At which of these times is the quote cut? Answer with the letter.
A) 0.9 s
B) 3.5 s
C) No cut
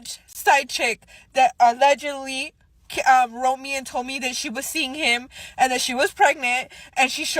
C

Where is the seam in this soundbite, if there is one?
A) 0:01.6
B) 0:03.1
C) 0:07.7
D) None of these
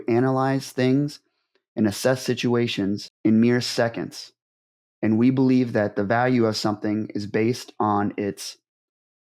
B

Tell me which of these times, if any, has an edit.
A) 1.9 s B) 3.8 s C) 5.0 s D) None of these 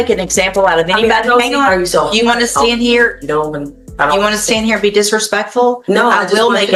D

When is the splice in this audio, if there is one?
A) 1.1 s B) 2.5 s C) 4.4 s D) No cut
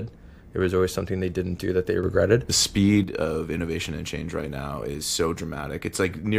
B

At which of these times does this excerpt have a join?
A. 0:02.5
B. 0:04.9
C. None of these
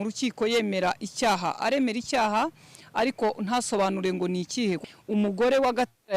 B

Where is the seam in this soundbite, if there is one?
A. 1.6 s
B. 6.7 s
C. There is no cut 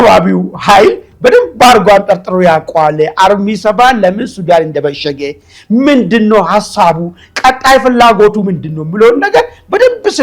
C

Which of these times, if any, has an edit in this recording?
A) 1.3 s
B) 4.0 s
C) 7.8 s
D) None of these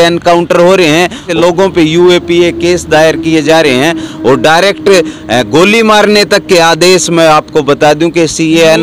A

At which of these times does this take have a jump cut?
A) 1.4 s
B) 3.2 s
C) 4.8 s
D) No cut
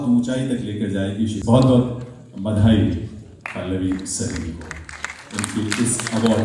A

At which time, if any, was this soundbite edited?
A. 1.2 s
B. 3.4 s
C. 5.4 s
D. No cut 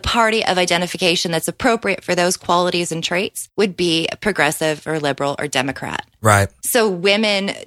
B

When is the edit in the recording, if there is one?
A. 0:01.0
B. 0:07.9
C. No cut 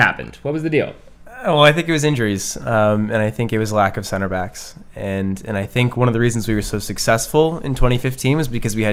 C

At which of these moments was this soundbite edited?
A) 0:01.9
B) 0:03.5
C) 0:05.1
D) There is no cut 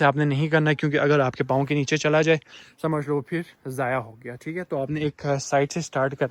D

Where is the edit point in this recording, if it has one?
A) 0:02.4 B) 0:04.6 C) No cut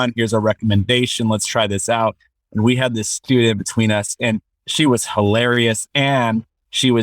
B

